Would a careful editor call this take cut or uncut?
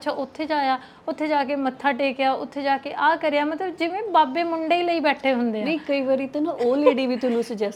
uncut